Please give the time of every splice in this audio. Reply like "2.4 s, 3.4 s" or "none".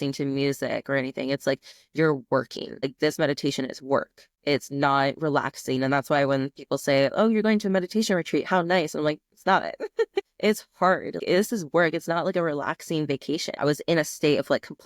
13.6 s